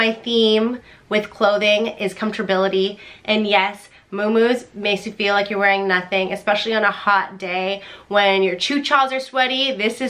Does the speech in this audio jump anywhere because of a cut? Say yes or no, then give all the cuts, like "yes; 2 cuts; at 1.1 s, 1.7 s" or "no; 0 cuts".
no; 0 cuts